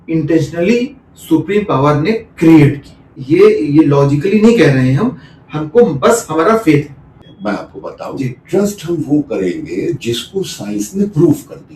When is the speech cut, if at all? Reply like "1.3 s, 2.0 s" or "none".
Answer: 3.1 s, 7.3 s